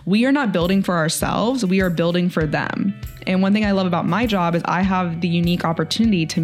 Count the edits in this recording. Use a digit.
0